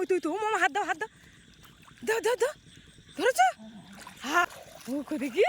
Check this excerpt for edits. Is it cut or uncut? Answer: cut